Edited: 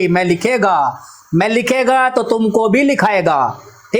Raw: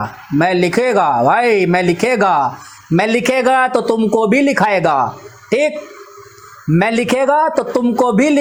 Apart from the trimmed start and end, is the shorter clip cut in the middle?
no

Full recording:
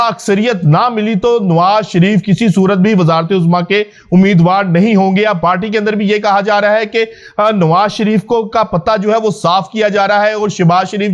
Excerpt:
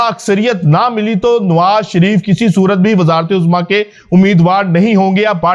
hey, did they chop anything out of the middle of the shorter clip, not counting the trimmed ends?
no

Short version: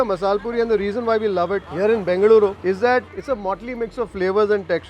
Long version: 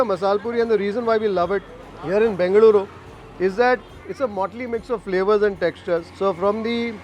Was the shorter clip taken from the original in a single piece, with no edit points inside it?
no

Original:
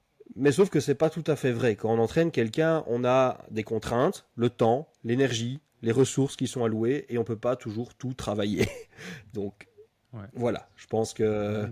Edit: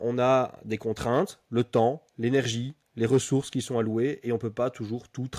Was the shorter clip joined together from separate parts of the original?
no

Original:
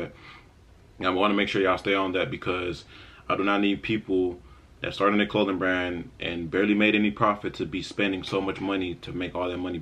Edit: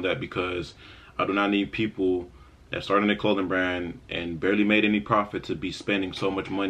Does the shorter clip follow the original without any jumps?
yes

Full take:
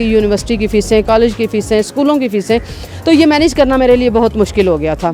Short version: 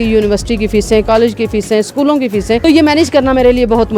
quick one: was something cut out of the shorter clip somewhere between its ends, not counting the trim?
yes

